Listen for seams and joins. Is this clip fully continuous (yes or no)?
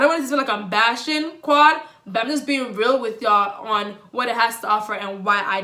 yes